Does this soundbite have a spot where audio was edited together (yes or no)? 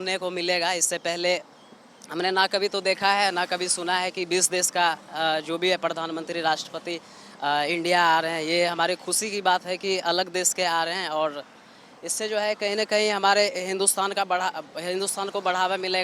no